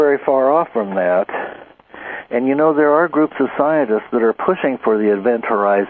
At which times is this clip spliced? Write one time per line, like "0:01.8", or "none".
0:03.8